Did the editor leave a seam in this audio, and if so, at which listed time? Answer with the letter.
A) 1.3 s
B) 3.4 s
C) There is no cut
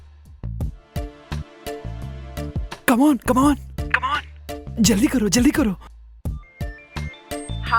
C